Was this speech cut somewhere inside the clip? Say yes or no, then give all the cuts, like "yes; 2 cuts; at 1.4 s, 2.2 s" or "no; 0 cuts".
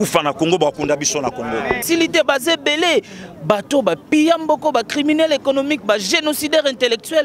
yes; 1 cut; at 1.8 s